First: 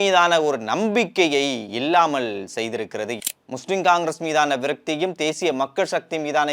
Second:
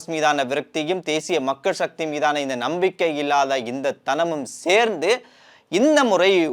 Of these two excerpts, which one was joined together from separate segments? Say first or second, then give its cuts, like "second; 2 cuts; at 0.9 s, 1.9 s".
first; 1 cut; at 3.1 s